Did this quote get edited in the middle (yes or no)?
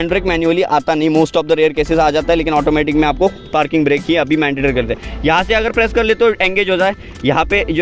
no